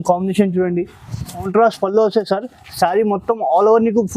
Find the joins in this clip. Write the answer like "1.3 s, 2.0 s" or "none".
1.5 s